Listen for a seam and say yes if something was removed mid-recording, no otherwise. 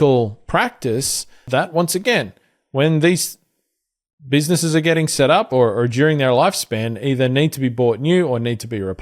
yes